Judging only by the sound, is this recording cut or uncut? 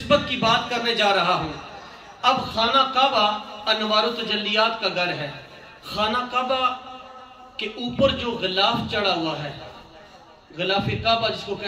uncut